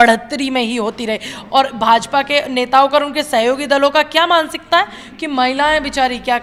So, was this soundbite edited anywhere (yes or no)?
no